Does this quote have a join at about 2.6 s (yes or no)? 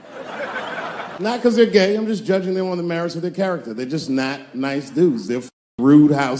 no